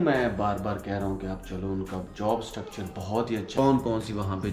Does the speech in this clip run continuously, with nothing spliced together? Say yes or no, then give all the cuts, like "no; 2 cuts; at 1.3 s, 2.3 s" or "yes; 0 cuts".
no; 1 cut; at 3.6 s